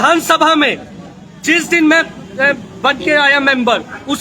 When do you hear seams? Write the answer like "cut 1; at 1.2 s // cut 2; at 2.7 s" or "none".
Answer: none